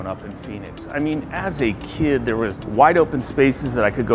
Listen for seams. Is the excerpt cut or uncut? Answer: cut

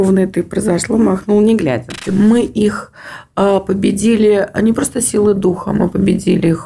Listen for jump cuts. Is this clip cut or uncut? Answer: cut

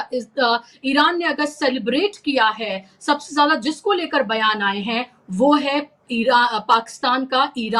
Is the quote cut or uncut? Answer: uncut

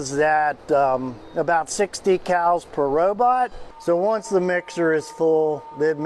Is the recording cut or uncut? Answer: cut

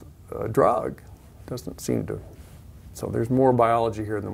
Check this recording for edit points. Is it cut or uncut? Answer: uncut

